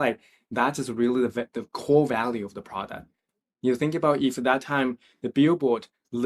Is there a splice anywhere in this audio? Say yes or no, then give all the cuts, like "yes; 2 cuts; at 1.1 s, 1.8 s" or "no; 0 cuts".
no; 0 cuts